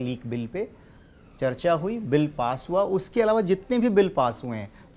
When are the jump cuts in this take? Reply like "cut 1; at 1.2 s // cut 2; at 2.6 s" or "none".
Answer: none

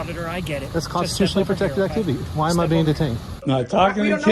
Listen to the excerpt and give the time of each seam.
cut 1; at 3.3 s

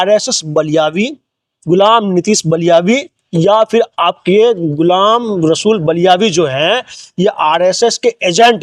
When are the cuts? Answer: none

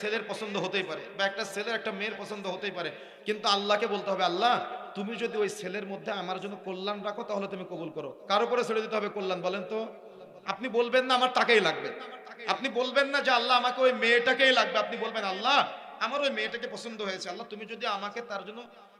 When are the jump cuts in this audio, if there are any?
none

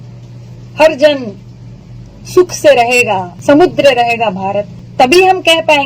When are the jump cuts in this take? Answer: cut 1; at 3.3 s // cut 2; at 4.8 s

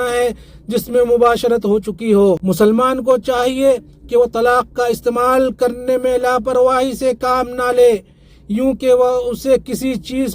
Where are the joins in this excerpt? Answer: cut 1; at 2.4 s

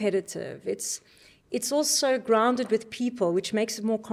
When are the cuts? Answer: none

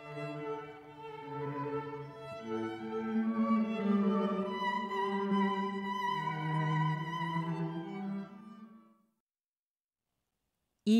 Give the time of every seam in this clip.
cut 1; at 2.1 s

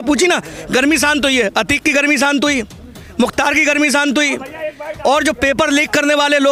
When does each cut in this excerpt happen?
none

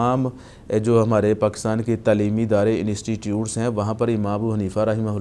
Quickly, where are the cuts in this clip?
none

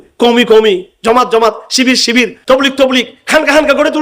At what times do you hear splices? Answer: cut 1; at 2.4 s

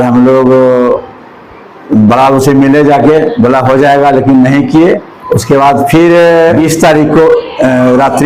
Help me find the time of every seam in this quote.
cut 1; at 5.1 s // cut 2; at 6.6 s

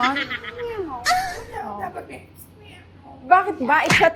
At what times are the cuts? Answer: none

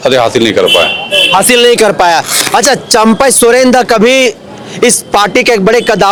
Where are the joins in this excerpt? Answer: none

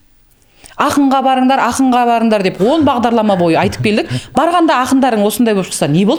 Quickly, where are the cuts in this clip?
none

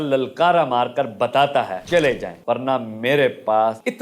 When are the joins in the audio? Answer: cut 1; at 1.8 s

